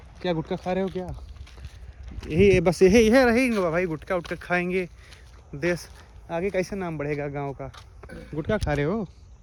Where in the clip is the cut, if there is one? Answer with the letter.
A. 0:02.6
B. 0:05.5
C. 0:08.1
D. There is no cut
D